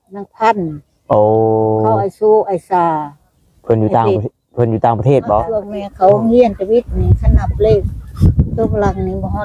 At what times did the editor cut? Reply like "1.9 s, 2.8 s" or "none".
5.8 s